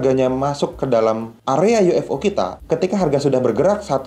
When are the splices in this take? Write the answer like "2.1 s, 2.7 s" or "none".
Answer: 1.3 s, 2.9 s